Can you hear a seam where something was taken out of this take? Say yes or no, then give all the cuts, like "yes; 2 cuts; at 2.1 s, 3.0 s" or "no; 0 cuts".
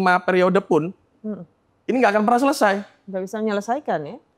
no; 0 cuts